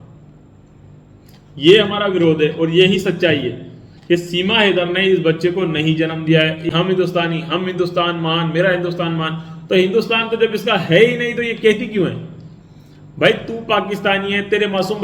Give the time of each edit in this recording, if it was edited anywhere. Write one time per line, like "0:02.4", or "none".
0:06.7